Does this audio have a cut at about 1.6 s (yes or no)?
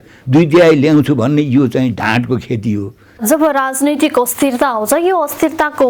no